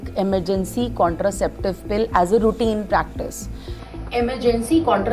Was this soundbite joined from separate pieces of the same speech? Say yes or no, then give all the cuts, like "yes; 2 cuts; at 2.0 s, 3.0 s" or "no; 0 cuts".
no; 0 cuts